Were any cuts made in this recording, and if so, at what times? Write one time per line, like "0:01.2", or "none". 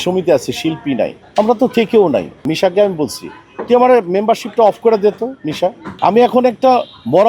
0:01.2
0:02.5
0:05.9

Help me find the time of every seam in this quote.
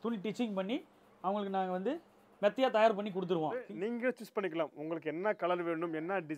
0:03.7

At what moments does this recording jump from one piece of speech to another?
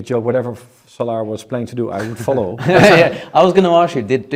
none

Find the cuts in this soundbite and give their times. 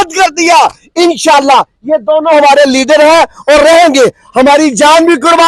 none

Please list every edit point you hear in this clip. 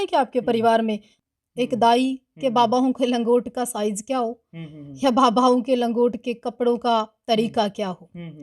0:01.2

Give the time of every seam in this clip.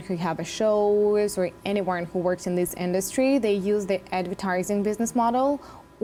none

